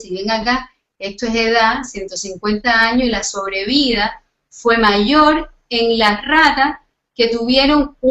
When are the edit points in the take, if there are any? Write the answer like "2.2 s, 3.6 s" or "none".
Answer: none